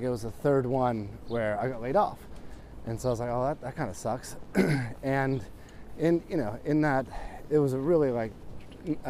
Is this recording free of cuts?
yes; 0 cuts

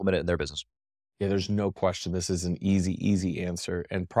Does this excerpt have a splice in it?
no; 0 cuts

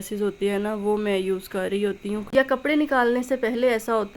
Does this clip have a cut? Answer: yes; 1 cut; at 2.2 s

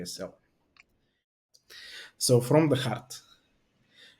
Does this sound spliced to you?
yes; 1 cut; at 1.4 s

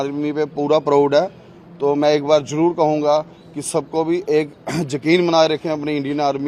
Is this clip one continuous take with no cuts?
yes; 0 cuts

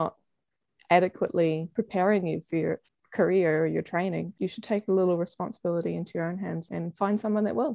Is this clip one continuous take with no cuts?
no; 4 cuts; at 1.7 s, 2.9 s, 4.3 s, 6.6 s

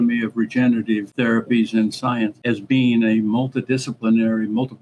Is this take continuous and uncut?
no; 2 cuts; at 1.1 s, 2.4 s

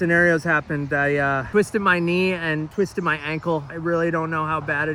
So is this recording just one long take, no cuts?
yes; 0 cuts

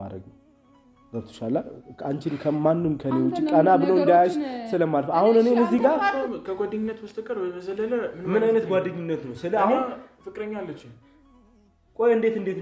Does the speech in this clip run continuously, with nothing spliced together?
no; 1 cut; at 6.1 s

